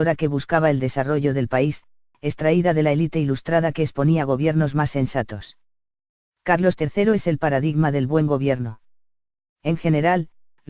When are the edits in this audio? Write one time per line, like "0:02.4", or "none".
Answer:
none